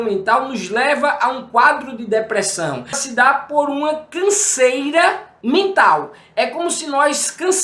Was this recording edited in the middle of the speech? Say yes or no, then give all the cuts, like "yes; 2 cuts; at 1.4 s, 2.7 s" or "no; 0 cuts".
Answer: yes; 2 cuts; at 3.0 s, 5.3 s